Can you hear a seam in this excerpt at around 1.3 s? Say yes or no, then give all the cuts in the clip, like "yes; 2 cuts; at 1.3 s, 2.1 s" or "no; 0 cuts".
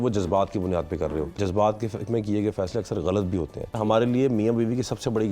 yes; 2 cuts; at 1.3 s, 3.8 s